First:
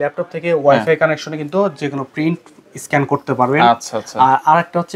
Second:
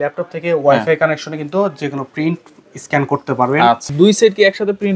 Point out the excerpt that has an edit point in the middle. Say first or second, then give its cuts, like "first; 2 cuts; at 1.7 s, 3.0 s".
second; 1 cut; at 3.9 s